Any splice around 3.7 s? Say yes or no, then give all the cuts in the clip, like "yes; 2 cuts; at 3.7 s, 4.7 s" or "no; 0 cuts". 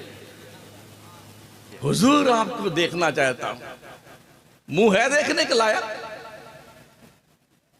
no; 1 cut; at 1.7 s